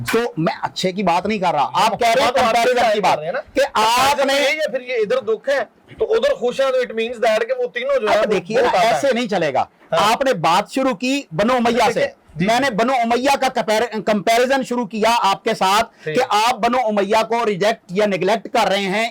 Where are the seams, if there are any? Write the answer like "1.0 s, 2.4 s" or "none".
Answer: none